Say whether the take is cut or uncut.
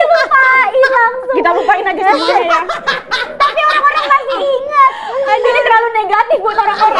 uncut